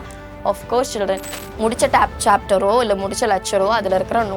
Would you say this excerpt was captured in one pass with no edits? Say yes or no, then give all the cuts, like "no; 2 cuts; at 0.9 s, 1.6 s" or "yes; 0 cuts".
no; 1 cut; at 1.4 s